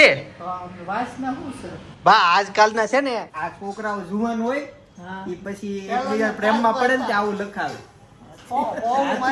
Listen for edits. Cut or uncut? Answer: uncut